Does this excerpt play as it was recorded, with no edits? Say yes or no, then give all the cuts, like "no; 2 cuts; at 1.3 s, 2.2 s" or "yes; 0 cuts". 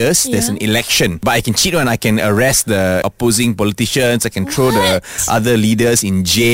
no; 2 cuts; at 1.2 s, 3.0 s